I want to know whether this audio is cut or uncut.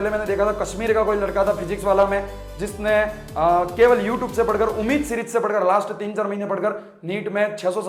uncut